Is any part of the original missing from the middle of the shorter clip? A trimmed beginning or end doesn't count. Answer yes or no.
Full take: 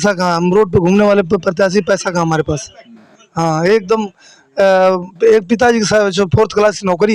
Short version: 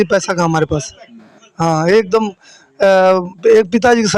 no